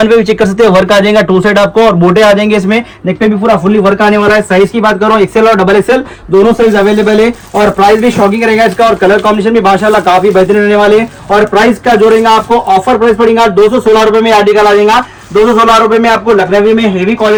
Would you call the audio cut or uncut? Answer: uncut